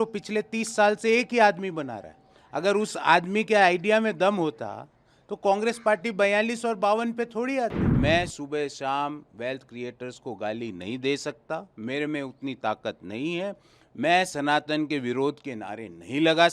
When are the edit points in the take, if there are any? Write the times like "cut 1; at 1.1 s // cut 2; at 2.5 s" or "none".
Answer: cut 1; at 7.8 s